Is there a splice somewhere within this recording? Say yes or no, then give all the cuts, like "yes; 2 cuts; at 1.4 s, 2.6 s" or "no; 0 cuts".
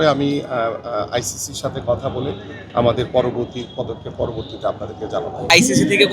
no; 0 cuts